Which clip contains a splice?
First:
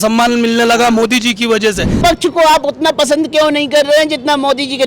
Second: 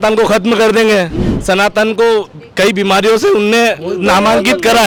first; 1 cut; at 2.0 s

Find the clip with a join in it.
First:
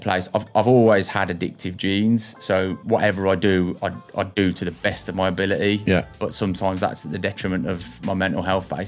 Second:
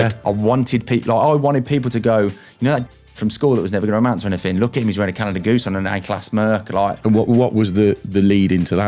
second; 1 cut; at 7.0 s

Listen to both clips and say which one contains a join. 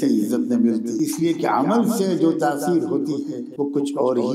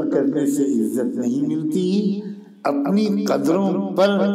first; 2 cuts; at 0.9 s, 3.4 s

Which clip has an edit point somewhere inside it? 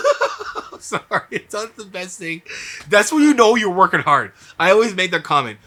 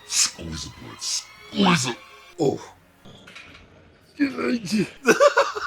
second; 1 cut; at 2.9 s

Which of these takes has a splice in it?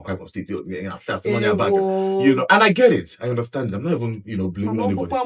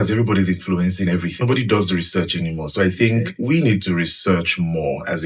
second; 2 cuts; at 1.4 s, 3.3 s

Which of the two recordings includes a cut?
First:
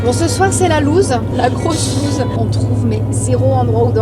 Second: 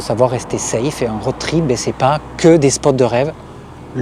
first; 2 cuts; at 1.3 s, 2.3 s

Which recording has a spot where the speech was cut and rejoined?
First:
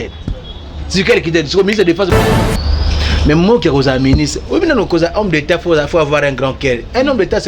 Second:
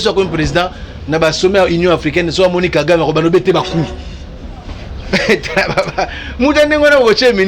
first; 1 cut; at 2.1 s

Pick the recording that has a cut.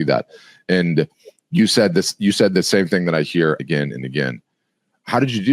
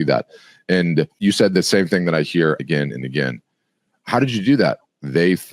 second; 1 cut; at 1.1 s

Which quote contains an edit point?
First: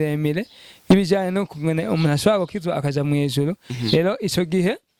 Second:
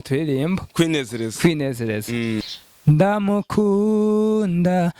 second; 1 cut; at 2.4 s

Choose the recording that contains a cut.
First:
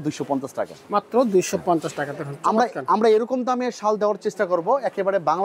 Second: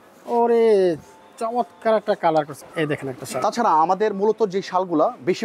second; 1 cut; at 2.5 s

